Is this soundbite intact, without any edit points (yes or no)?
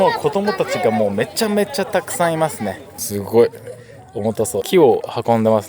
no